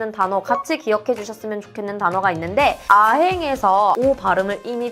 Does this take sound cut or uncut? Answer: cut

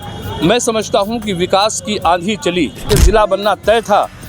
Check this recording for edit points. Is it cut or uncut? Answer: cut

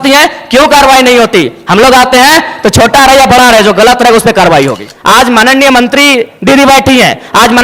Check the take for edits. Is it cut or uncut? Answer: cut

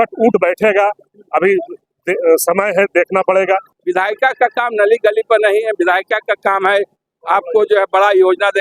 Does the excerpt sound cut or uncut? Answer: cut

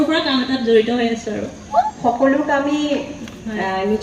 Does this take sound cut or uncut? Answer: cut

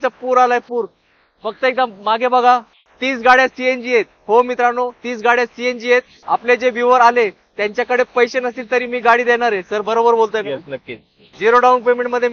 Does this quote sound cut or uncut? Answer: cut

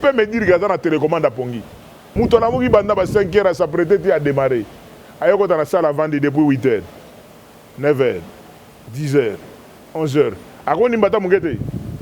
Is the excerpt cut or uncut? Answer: cut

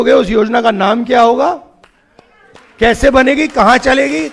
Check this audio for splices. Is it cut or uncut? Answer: uncut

